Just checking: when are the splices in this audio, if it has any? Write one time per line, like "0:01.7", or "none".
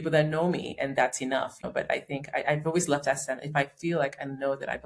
0:01.6